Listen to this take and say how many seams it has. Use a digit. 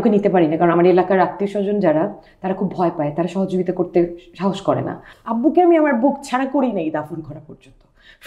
1